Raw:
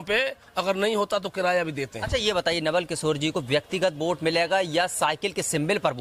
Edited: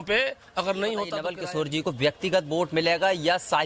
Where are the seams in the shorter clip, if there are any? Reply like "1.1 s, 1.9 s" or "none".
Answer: 1.2 s